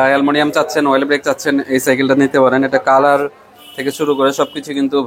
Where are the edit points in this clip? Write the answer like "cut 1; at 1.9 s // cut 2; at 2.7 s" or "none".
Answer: none

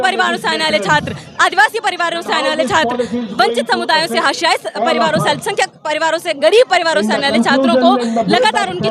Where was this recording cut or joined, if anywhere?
none

